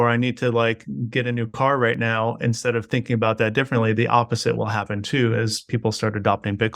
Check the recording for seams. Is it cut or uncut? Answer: uncut